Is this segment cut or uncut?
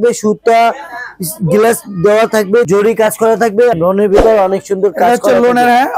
cut